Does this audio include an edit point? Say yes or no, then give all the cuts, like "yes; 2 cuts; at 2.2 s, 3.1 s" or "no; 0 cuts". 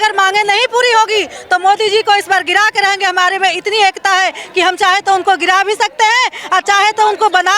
no; 0 cuts